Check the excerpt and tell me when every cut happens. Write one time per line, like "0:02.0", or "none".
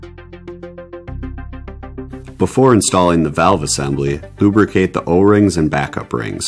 0:02.3